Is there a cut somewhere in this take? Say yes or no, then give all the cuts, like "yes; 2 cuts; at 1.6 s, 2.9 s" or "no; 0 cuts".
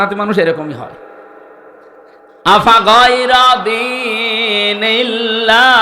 yes; 1 cut; at 2.3 s